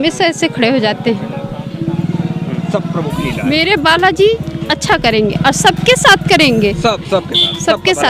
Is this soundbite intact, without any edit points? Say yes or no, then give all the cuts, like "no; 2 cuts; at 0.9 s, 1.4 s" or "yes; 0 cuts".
yes; 0 cuts